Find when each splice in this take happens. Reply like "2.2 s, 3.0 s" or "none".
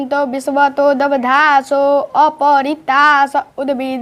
none